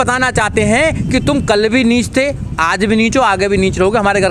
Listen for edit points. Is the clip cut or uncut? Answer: uncut